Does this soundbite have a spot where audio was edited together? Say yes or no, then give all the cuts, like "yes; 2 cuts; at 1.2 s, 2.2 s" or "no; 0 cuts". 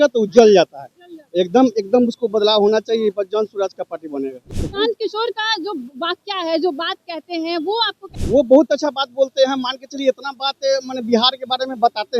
yes; 2 cuts; at 4.5 s, 8.1 s